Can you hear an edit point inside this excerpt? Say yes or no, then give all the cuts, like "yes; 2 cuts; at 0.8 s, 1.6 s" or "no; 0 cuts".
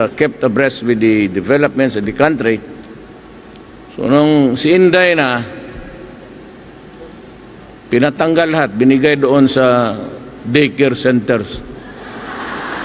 no; 0 cuts